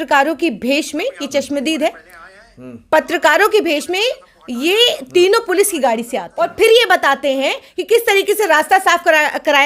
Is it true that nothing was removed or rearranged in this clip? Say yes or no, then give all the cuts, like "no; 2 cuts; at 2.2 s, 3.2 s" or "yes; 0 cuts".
no; 1 cut; at 6.2 s